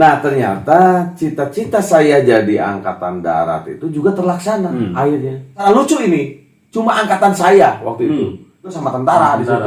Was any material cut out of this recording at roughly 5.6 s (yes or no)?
yes